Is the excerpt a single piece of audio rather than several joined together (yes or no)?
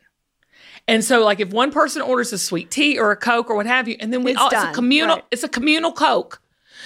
yes